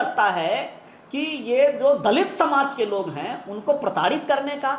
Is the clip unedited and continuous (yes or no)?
yes